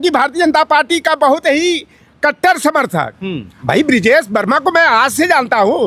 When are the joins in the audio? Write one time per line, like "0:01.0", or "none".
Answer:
0:03.4